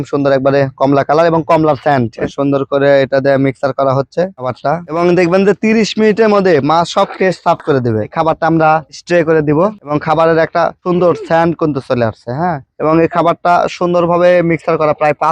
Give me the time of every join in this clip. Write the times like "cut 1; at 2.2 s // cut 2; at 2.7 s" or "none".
cut 1; at 2.2 s // cut 2; at 8.1 s // cut 3; at 9.8 s